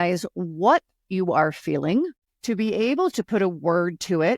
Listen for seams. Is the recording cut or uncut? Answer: cut